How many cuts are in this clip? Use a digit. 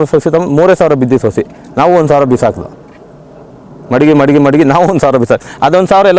0